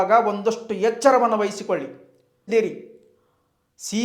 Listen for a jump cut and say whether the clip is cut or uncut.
cut